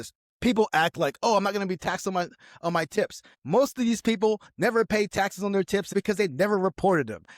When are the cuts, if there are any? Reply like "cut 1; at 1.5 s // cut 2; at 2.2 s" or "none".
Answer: cut 1; at 5.9 s